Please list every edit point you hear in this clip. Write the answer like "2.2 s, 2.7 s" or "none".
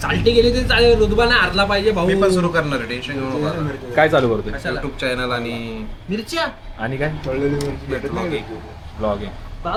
none